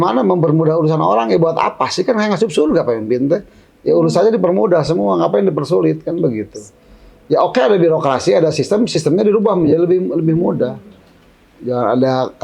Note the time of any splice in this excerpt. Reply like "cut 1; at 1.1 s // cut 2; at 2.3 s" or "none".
none